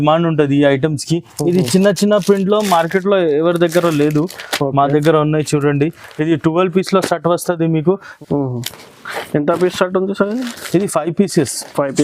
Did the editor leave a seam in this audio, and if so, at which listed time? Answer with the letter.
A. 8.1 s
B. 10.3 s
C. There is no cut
A